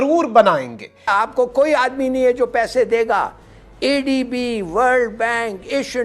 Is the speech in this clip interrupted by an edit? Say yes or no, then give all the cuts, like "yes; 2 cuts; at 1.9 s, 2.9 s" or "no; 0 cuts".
yes; 1 cut; at 1.1 s